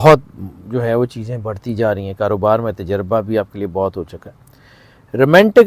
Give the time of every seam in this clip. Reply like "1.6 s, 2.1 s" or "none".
none